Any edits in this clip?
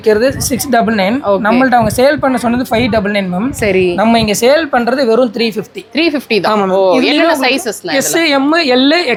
no; 0 cuts

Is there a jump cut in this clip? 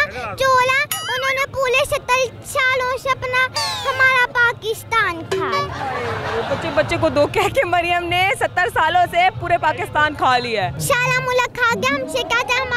yes; 1 cut; at 10.7 s

